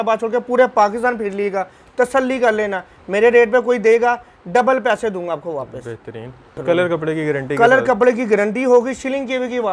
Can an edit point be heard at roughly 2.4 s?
no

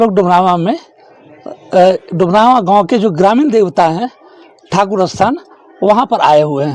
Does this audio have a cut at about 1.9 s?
no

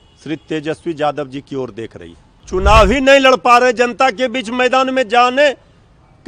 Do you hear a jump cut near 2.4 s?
yes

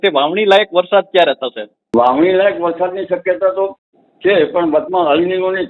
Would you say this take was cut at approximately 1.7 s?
yes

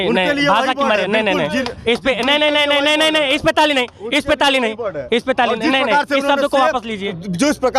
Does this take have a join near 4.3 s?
no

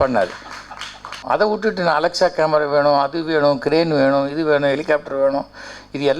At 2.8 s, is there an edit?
no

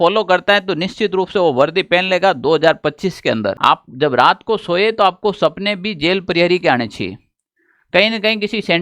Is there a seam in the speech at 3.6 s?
yes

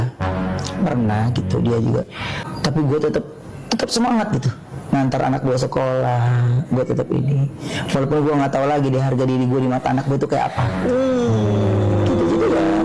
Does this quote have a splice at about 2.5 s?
yes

